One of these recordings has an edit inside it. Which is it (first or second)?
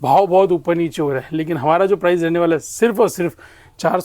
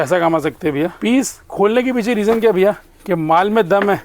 second